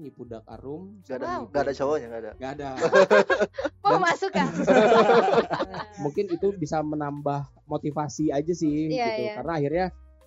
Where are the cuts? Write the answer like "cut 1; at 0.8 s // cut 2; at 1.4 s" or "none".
cut 1; at 5.9 s